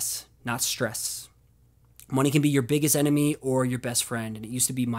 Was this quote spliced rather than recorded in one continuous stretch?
no; 0 cuts

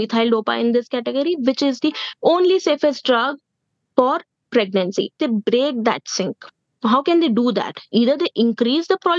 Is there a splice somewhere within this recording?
yes; 1 cut; at 5.1 s

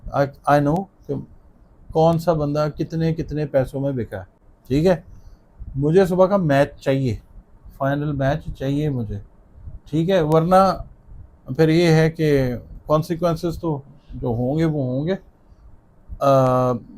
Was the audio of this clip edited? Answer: no; 0 cuts

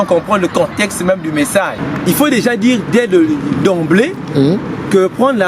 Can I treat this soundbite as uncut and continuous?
no; 1 cut; at 1.8 s

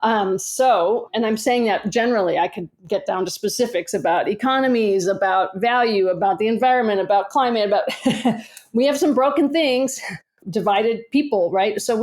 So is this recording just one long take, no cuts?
no; 2 cuts; at 1.0 s, 10.4 s

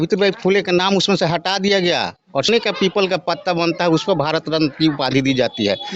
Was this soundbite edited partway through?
yes; 1 cut; at 2.5 s

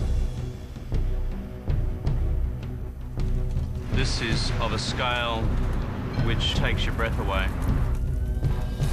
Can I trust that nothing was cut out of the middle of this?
yes; 0 cuts

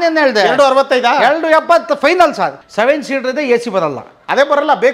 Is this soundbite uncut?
no; 1 cut; at 2.6 s

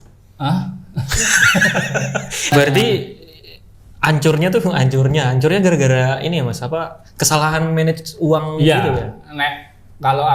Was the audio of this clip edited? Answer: yes; 1 cut; at 2.5 s

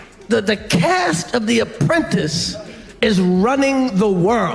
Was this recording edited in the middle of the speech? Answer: no; 0 cuts

